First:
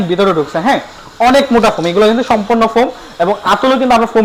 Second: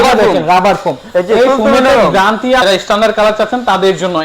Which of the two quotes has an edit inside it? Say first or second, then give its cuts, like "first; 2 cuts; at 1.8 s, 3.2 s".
second; 1 cut; at 2.6 s